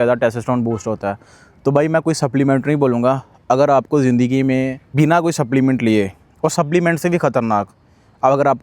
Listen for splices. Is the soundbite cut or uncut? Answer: cut